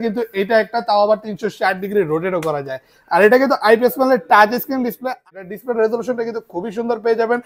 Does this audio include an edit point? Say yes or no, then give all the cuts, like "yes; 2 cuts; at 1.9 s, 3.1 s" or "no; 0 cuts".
yes; 1 cut; at 5.3 s